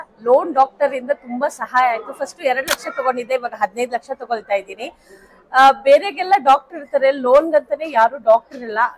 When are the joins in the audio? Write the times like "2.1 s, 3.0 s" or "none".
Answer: none